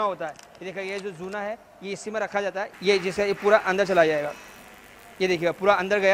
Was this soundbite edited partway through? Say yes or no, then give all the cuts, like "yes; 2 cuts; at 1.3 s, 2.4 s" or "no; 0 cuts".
yes; 1 cut; at 2.7 s